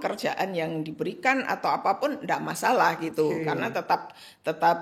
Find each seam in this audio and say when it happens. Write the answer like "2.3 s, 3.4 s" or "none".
none